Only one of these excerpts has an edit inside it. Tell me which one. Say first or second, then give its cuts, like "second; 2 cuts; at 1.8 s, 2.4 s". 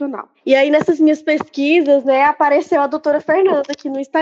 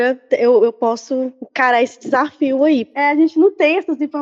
second; 2 cuts; at 1.4 s, 2.9 s